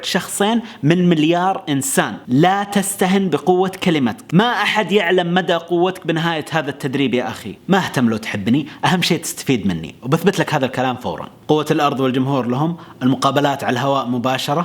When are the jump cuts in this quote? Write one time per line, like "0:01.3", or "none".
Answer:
0:04.2
0:07.5
0:11.3